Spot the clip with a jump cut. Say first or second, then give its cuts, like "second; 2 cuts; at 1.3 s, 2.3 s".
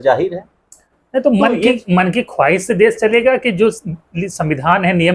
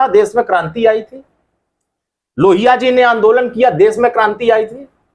first; 1 cut; at 0.9 s